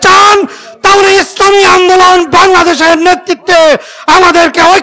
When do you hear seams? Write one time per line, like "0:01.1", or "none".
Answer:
none